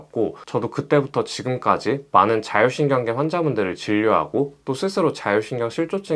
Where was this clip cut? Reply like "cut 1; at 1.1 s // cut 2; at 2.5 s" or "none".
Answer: none